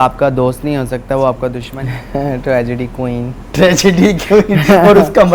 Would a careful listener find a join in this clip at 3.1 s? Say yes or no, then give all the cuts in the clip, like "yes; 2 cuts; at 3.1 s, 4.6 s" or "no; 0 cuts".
no; 1 cut; at 1.7 s